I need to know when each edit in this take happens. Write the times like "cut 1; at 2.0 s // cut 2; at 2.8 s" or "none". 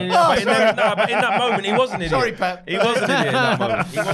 none